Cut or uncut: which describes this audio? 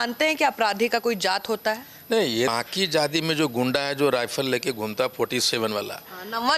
cut